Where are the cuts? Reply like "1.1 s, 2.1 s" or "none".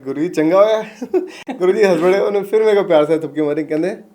1.4 s